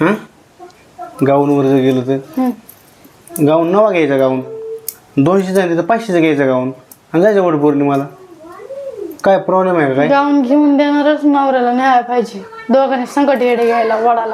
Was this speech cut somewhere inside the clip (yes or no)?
no